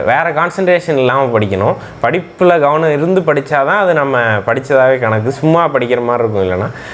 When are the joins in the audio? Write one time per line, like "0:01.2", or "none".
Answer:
none